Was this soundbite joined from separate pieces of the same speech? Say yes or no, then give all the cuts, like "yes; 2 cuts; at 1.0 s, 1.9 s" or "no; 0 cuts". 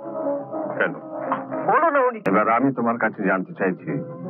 yes; 1 cut; at 2.2 s